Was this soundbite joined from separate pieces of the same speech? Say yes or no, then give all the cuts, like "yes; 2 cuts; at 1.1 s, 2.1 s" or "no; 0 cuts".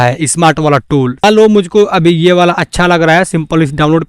yes; 1 cut; at 1.2 s